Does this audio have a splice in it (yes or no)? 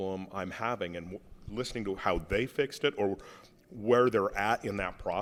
no